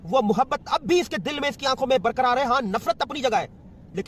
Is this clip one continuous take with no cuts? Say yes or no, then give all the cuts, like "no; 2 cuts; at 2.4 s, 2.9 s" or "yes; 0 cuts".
yes; 0 cuts